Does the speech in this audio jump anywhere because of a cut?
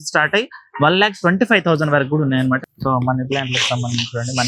yes; 1 cut; at 2.7 s

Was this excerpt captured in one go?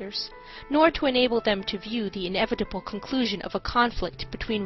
no; 1 cut; at 1.2 s

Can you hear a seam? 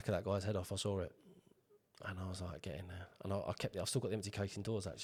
no; 0 cuts

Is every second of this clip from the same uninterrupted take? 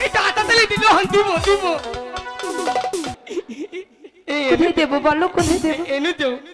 no; 1 cut; at 3.2 s

